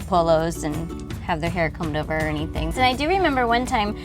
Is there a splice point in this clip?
yes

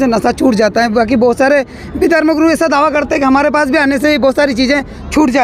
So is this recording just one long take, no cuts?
yes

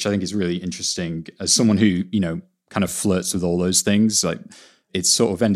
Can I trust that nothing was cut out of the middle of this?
yes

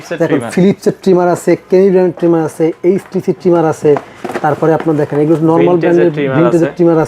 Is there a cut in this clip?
no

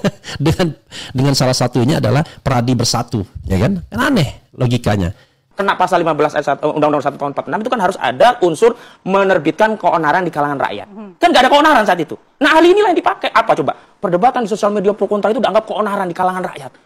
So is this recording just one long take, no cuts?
no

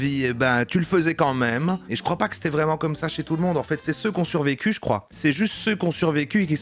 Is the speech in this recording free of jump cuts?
no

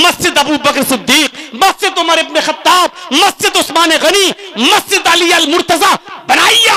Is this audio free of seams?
yes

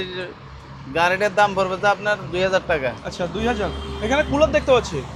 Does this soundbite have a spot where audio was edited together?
no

